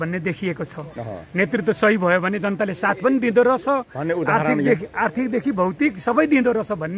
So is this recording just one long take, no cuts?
yes; 0 cuts

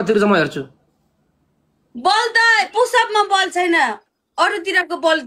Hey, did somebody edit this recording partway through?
no; 0 cuts

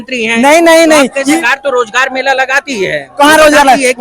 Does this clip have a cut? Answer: yes; 1 cut; at 1.4 s

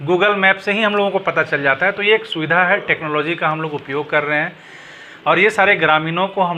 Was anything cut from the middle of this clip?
no; 0 cuts

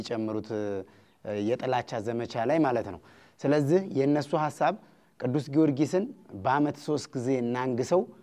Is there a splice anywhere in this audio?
no; 0 cuts

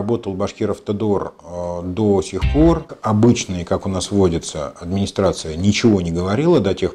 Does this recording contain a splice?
yes; 1 cut; at 2.9 s

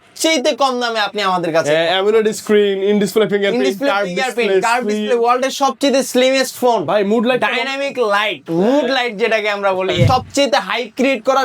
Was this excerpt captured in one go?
no; 1 cut; at 10.0 s

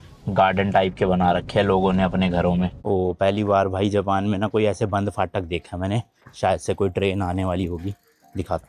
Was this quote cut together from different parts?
yes; 1 cut; at 2.8 s

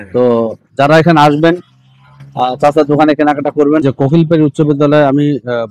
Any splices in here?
yes; 1 cut; at 3.8 s

